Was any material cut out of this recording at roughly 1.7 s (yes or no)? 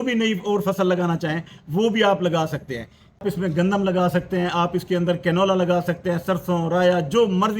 no